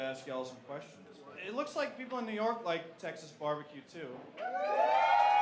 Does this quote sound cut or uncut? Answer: cut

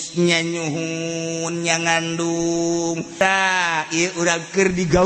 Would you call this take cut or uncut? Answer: cut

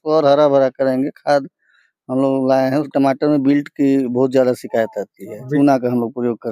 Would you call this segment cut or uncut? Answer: cut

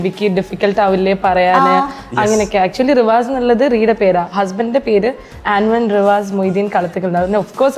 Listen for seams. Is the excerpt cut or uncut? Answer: uncut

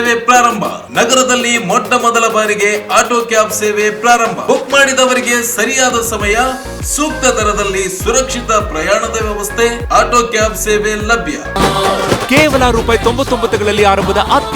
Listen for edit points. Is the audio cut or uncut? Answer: cut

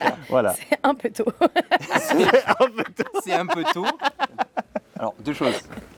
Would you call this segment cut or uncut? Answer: uncut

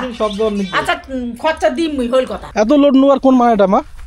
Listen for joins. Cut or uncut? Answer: cut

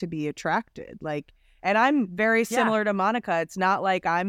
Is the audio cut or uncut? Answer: uncut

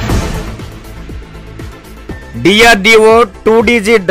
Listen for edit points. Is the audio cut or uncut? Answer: uncut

